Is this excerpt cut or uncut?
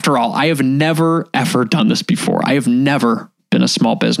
uncut